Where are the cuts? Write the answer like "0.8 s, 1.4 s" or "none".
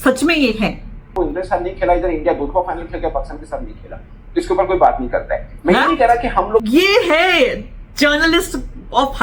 1.1 s, 6.7 s